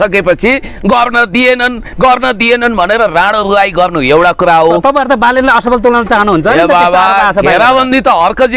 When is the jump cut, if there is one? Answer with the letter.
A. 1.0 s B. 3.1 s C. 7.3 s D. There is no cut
D